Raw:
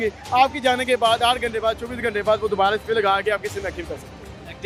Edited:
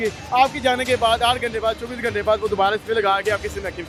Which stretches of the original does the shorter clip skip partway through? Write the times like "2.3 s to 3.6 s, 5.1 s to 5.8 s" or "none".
none